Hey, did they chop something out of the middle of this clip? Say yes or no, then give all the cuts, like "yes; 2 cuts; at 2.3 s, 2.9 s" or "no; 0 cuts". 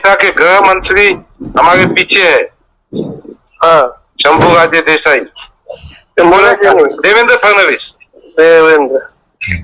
no; 0 cuts